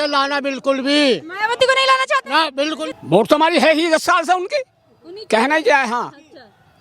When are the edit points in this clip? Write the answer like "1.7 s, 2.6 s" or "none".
2.9 s